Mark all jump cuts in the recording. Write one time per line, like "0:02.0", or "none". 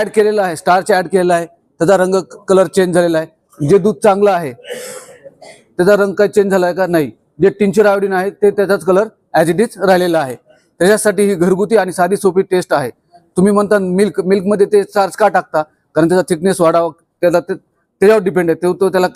none